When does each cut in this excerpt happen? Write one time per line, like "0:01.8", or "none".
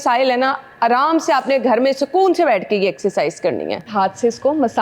0:03.9